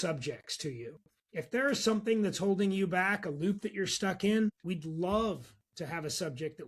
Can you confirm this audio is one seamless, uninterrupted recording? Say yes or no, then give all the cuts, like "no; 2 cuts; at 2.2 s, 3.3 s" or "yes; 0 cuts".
no; 1 cut; at 4.6 s